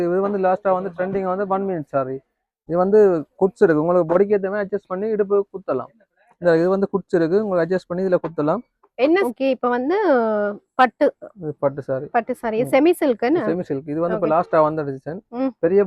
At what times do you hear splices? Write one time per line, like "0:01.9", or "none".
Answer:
0:09.2